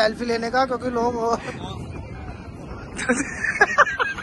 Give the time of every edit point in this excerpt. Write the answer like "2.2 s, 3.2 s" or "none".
1.5 s